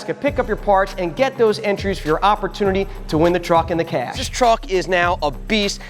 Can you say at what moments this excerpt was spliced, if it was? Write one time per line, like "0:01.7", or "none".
0:04.2

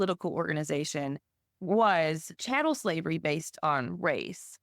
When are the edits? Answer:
0:02.3

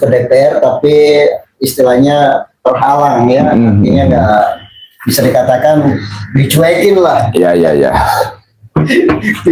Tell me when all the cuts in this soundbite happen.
none

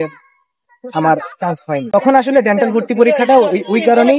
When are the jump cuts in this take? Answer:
0:01.8

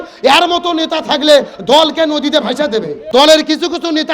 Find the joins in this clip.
0:03.0

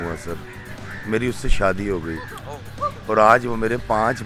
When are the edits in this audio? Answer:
none

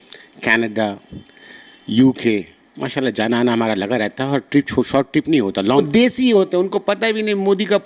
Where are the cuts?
0:05.6

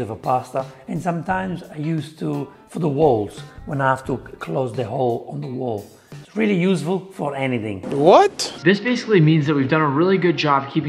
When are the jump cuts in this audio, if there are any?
0:08.4

